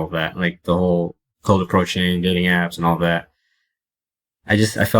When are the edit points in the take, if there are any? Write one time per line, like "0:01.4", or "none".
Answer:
0:01.3